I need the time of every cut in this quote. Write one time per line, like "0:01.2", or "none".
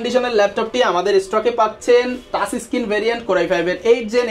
none